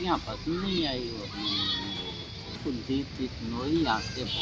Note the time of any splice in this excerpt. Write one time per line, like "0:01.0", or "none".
0:02.6